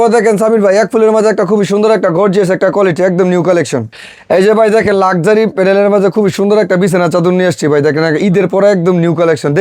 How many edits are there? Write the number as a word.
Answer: one